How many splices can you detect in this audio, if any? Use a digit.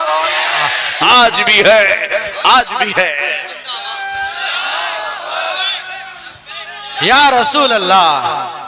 0